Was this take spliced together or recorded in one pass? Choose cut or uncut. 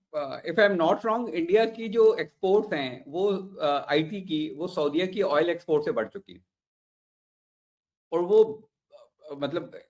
uncut